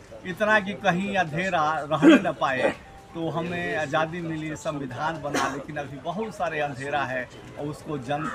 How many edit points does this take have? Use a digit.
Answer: 0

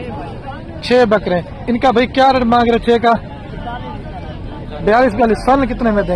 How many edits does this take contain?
0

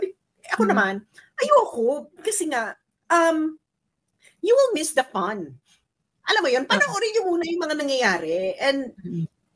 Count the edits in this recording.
0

